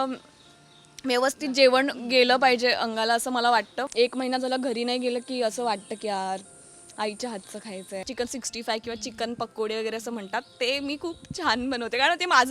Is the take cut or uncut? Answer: cut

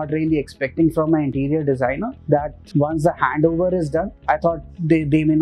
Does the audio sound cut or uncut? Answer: cut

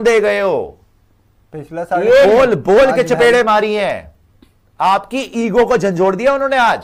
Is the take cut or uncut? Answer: uncut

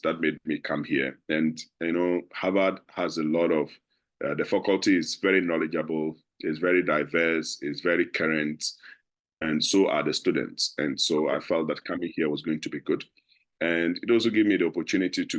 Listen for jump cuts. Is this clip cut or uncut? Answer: uncut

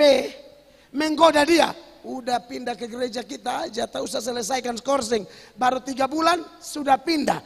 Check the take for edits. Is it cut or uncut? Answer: uncut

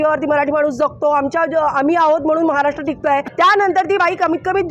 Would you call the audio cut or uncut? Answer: cut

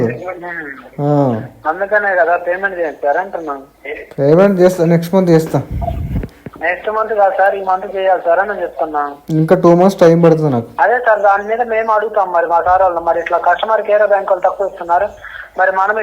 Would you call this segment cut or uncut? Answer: cut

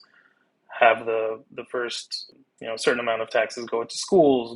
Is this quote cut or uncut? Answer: cut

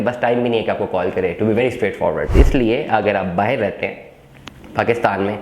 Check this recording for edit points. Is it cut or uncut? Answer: cut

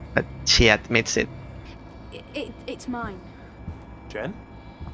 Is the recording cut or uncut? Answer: cut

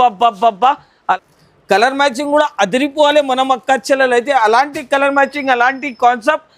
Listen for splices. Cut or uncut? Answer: cut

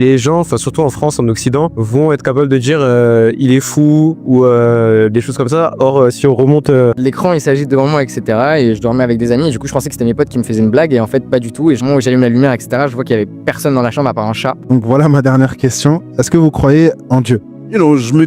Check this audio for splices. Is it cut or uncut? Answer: cut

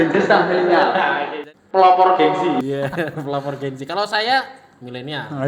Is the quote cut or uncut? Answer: cut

